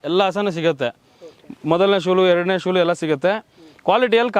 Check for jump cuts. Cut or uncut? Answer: uncut